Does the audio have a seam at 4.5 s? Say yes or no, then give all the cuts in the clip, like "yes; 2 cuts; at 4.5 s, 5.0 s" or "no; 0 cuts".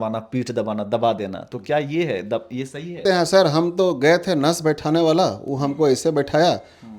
no; 1 cut; at 3.0 s